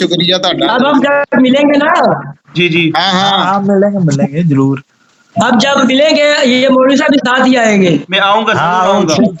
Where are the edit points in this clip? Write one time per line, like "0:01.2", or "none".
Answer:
none

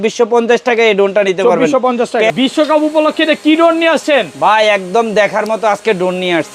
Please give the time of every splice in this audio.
0:02.3

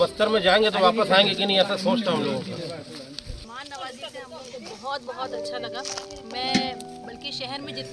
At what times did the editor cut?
0:03.4

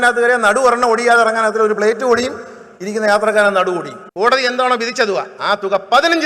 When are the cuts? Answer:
0:04.0

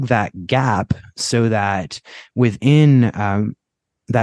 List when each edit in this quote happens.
none

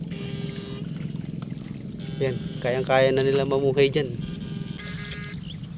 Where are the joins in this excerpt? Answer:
0:04.8

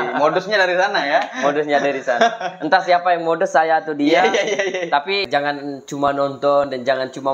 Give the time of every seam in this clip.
0:05.2

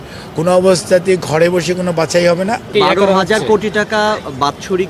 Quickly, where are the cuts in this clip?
0:02.7

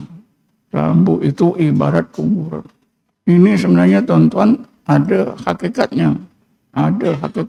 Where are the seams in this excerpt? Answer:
none

